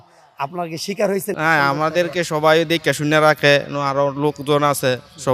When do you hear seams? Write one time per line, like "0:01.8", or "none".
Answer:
0:01.3